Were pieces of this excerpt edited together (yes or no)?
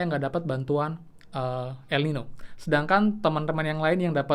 no